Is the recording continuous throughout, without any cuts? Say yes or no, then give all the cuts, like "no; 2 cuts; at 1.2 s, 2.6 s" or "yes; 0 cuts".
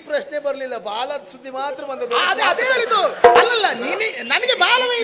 yes; 0 cuts